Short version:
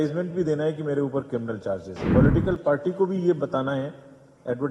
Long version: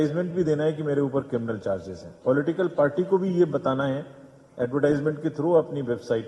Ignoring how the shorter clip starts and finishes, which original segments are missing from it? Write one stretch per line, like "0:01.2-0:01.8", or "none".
0:01.9-0:02.1